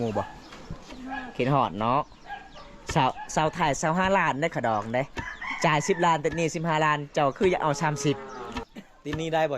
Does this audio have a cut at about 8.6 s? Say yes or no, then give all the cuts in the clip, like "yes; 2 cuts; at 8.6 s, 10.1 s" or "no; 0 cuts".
yes; 1 cut; at 8.6 s